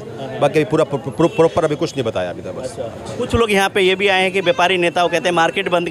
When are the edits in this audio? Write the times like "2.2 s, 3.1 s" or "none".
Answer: none